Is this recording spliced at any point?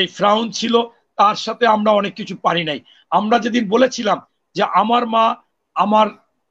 no; 0 cuts

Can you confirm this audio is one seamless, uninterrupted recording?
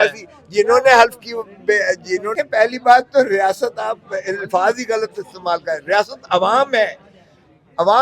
no; 1 cut; at 2.3 s

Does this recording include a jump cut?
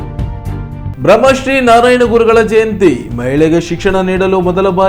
yes; 1 cut; at 0.9 s

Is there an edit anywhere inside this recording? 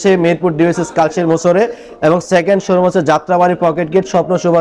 no; 0 cuts

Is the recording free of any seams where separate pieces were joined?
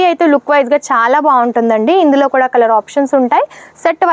yes; 0 cuts

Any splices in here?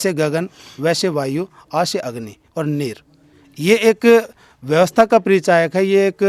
no; 0 cuts

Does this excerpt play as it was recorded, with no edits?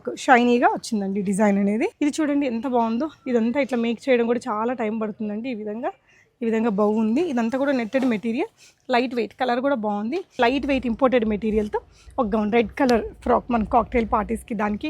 no; 2 cuts; at 1.9 s, 10.4 s

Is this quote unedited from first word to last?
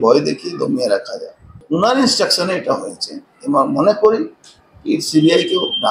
no; 1 cut; at 1.6 s

